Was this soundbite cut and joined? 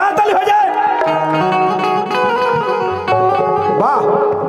no; 0 cuts

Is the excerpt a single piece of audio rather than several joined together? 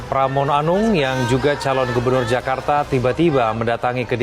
yes; 0 cuts

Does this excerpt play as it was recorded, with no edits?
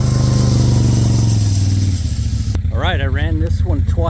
yes; 0 cuts

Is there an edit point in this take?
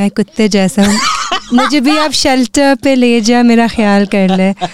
no; 0 cuts

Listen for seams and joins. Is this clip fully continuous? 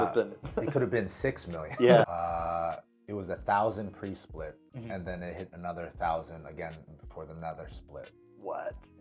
no; 1 cut; at 2.1 s

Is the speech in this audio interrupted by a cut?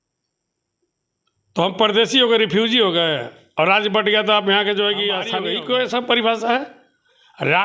yes; 1 cut; at 5.4 s

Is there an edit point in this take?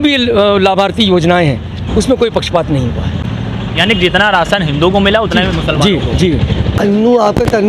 yes; 2 cuts; at 3.2 s, 6.8 s

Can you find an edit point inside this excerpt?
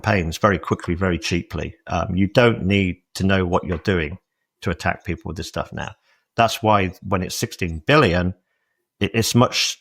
no; 0 cuts

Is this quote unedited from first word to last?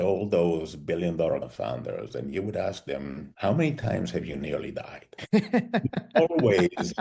no; 1 cut; at 1.5 s

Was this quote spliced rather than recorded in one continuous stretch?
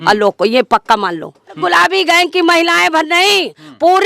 yes; 1 cut; at 1.5 s

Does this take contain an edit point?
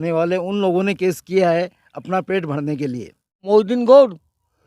yes; 1 cut; at 3.4 s

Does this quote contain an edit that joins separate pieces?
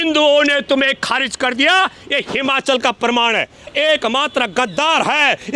yes; 1 cut; at 3.7 s

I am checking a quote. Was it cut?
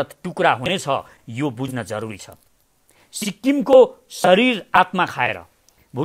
no; 0 cuts

